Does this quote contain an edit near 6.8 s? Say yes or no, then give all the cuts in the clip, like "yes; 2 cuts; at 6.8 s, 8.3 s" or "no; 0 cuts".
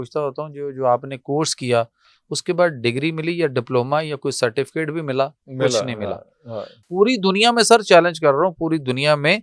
yes; 1 cut; at 6.8 s